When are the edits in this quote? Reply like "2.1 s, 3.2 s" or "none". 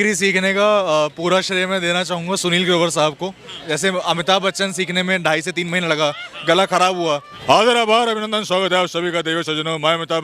3.6 s, 7.3 s